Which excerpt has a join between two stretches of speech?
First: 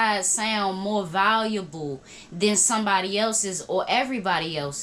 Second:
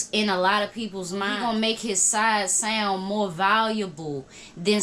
second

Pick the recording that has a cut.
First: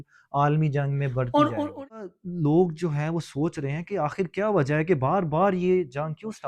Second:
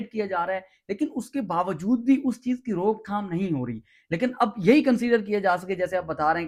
first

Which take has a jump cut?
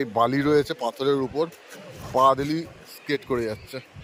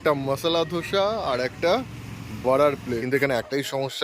second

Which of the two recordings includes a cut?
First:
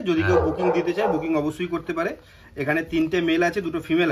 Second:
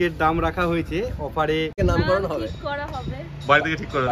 second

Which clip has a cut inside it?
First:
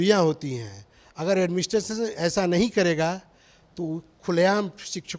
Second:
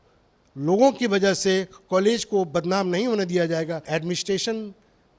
second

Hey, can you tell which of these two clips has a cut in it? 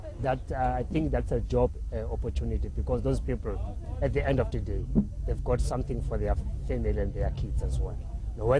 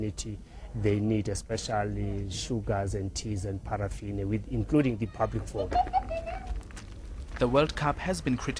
first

